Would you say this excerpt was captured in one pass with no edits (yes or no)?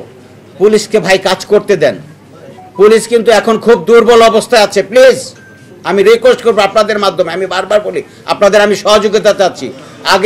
yes